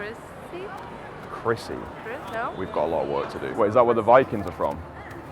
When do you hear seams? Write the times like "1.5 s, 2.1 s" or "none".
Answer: 3.5 s

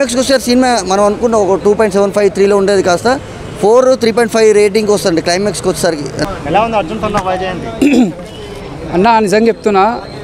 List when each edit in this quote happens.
none

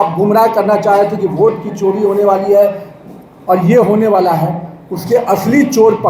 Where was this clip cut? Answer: none

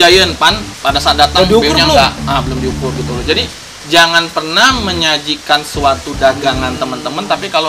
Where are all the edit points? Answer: none

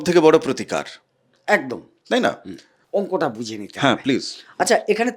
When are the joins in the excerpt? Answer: 2.8 s

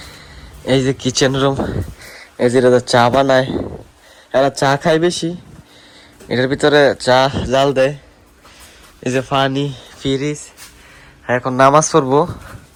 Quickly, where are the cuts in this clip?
none

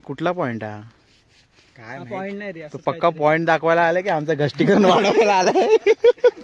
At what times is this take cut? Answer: none

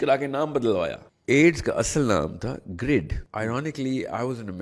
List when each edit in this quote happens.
1.1 s, 3.2 s

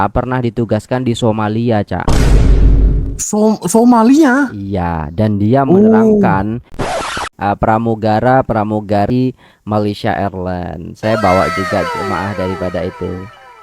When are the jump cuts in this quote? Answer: 6.9 s

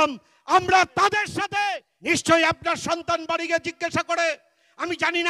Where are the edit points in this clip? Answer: 1.8 s

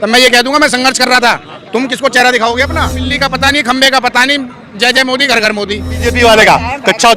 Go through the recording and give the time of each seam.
3.1 s, 6.0 s

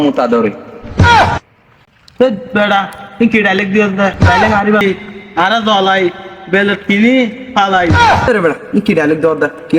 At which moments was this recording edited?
4.8 s

